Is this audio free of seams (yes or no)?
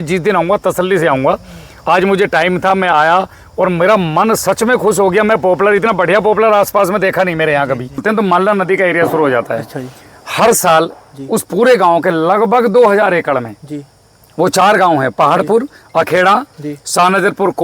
no